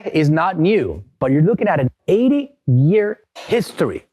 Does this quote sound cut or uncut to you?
cut